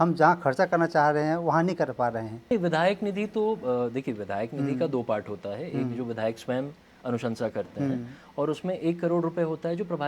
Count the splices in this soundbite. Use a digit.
1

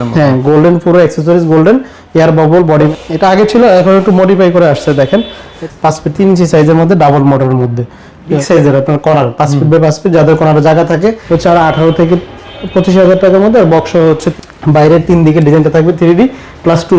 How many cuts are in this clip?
5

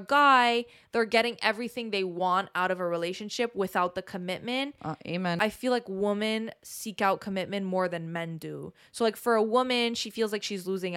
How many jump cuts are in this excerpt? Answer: 1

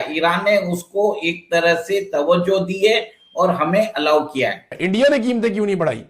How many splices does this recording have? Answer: 1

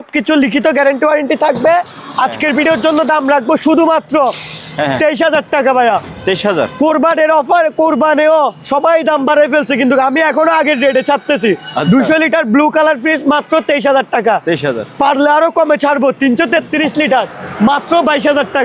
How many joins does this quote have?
0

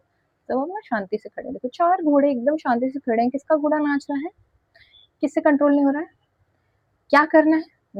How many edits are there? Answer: 0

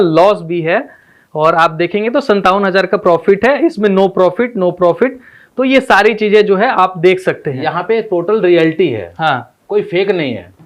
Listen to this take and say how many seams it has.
0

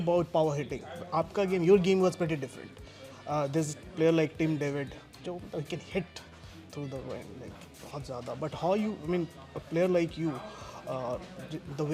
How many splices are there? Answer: 0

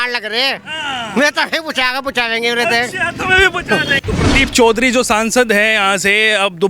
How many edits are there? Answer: 1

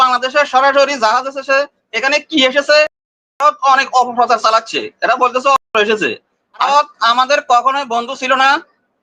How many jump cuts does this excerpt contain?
1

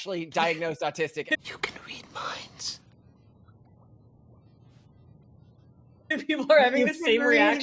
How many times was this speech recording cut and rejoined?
2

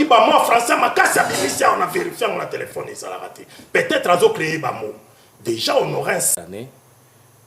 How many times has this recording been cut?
1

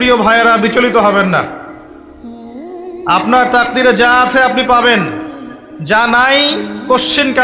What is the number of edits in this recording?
0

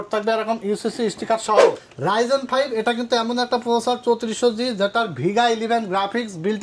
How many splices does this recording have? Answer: 1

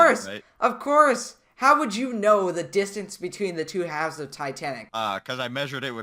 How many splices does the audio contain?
1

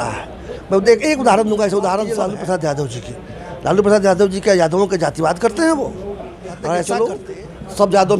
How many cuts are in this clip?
2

